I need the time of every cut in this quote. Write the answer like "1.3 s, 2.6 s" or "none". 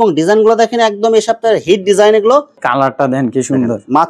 2.6 s